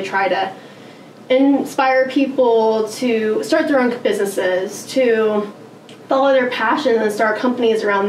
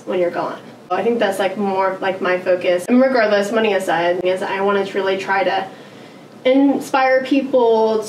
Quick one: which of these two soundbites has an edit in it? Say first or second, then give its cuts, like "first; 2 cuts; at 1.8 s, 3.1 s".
second; 3 cuts; at 0.9 s, 2.8 s, 4.2 s